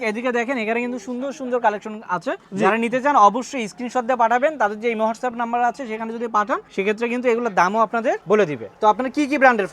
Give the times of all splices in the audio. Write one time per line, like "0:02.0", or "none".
0:08.6